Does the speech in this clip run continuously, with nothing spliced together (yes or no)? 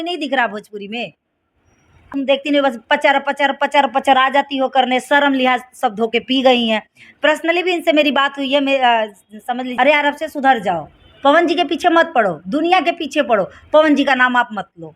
no